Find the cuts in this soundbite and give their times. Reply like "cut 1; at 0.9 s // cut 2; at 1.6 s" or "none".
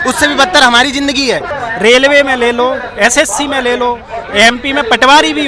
cut 1; at 1.5 s